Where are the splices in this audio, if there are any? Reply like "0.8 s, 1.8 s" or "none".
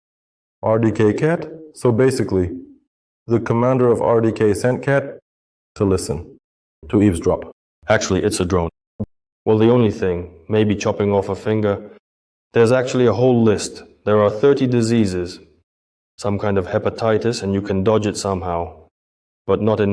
8.9 s